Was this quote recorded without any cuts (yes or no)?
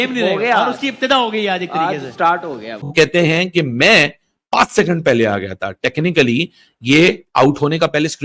no